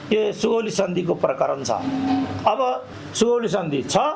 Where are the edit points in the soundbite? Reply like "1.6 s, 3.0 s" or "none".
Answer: 3.0 s